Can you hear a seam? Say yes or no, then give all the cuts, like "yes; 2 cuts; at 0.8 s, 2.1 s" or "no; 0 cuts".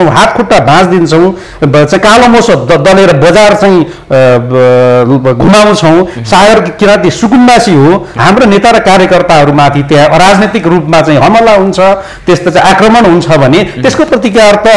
yes; 1 cut; at 8.1 s